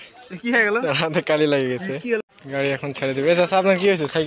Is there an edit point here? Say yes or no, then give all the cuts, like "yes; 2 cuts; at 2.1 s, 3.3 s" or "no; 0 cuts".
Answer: yes; 1 cut; at 2.2 s